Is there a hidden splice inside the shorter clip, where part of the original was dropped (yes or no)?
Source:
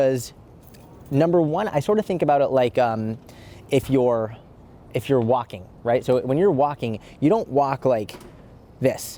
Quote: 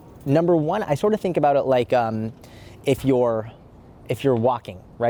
no